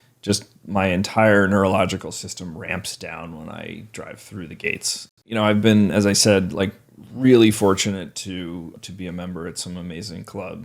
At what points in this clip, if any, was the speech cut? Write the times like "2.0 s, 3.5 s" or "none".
5.2 s, 8.8 s